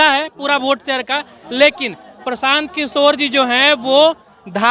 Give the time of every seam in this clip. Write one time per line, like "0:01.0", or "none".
none